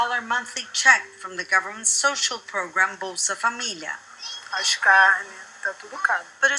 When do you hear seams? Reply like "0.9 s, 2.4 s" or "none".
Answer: 2.9 s